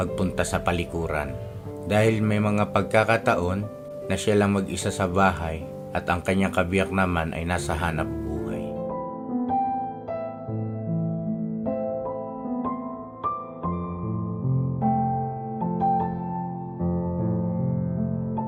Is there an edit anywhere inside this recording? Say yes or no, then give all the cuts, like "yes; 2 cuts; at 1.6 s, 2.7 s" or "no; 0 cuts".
no; 0 cuts